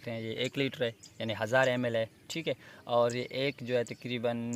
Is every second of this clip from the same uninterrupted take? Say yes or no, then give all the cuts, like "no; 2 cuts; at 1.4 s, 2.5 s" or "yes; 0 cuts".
yes; 0 cuts